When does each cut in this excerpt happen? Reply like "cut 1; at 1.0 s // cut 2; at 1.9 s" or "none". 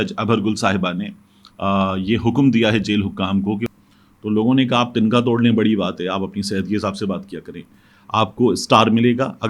cut 1; at 3.7 s // cut 2; at 7.8 s